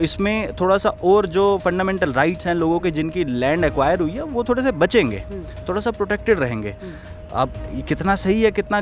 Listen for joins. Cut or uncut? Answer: uncut